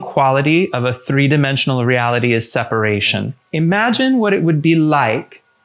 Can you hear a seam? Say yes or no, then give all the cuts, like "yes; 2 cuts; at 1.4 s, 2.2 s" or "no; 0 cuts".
yes; 1 cut; at 3.4 s